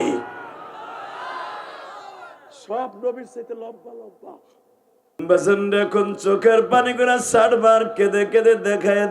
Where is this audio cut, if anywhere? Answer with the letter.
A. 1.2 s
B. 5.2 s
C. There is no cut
B